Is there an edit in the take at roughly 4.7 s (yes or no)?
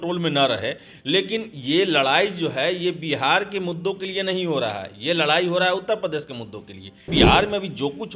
no